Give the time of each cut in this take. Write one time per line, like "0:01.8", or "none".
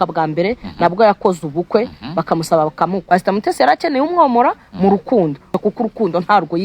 0:03.0
0:05.6